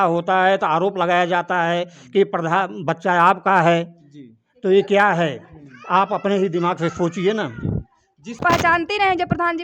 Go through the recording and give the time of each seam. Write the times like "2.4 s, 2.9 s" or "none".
8.4 s